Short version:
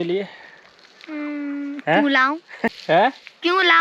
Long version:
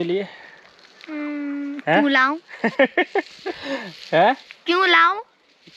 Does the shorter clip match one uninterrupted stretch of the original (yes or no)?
no